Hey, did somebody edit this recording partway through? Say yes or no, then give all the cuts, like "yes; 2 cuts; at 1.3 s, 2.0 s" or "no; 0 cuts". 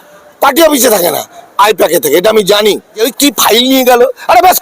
yes; 1 cut; at 3.1 s